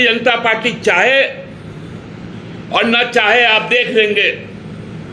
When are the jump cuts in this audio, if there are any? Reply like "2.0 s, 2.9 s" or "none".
none